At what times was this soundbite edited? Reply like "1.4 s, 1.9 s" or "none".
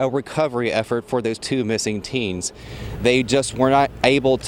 none